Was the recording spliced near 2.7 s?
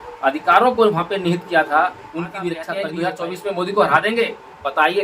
yes; 1 cut; at 2.7 s

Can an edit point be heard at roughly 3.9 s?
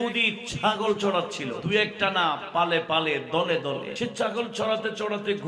yes; 2 cuts; at 1.6 s, 3.9 s

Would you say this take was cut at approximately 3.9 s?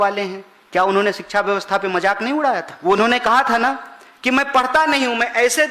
no; 1 cut; at 2.7 s

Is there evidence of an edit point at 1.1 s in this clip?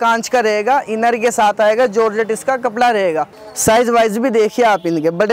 no; 1 cut; at 3.4 s

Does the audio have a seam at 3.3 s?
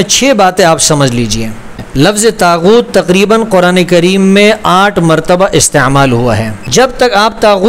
no; 2 cuts; at 1.8 s, 6.5 s

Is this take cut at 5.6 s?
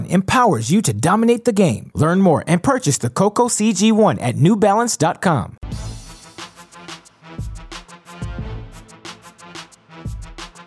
yes; 2 cuts; at 5.6 s, 7.8 s

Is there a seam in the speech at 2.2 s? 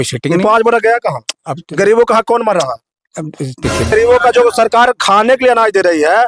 no; 1 cut; at 3.9 s

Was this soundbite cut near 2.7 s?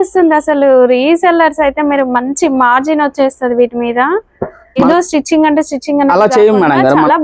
no; 1 cut; at 4.8 s

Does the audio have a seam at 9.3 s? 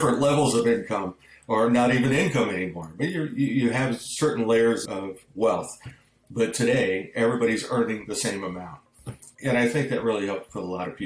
yes; 1 cut; at 9.3 s

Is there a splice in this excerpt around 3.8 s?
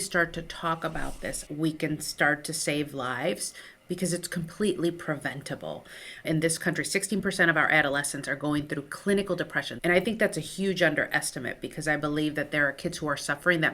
no; 3 cuts; at 1.4 s, 6.1 s, 9.6 s

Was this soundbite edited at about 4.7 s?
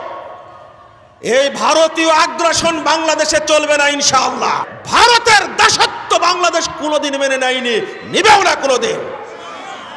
yes; 1 cut; at 4.7 s

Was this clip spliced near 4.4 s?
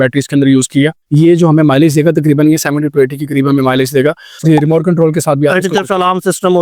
yes; 1 cut; at 4.4 s

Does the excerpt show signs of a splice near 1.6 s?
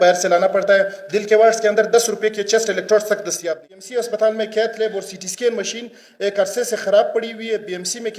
no; 1 cut; at 3.4 s

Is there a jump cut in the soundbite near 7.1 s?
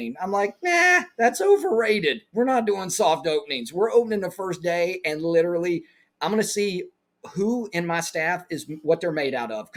no; 0 cuts

